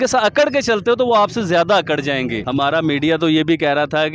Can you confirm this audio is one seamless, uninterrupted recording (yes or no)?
no